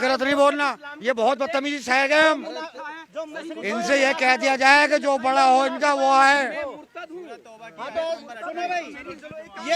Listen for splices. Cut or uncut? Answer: uncut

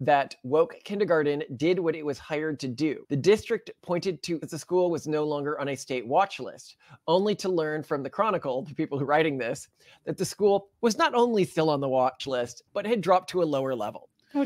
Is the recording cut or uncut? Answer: cut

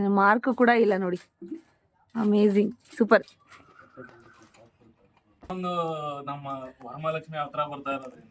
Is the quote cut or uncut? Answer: cut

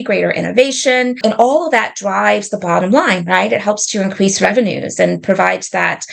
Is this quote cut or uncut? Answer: cut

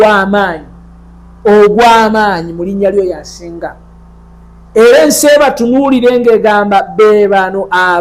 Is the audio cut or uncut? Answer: uncut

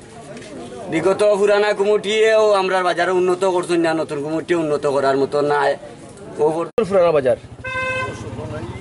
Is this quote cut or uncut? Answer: cut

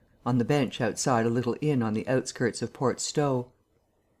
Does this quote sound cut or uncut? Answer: cut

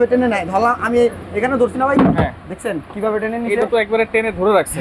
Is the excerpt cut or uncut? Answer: uncut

